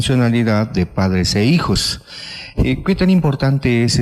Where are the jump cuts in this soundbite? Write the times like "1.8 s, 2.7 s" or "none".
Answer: 1.4 s